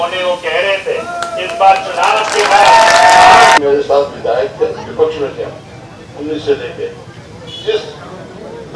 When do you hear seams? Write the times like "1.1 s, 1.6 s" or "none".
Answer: 3.6 s